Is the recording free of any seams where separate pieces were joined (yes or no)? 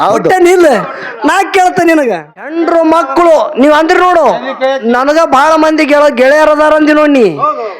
no